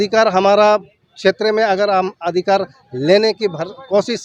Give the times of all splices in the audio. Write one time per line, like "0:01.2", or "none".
none